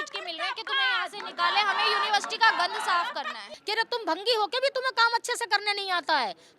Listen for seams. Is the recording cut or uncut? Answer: cut